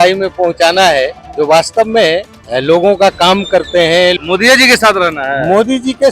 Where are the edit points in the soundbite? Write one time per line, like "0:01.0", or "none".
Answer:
0:01.2
0:02.4
0:04.2